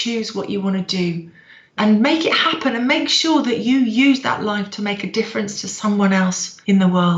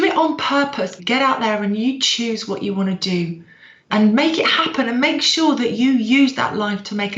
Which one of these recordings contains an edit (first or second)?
second